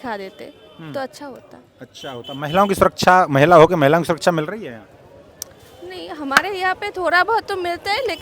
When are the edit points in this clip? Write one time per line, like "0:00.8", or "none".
none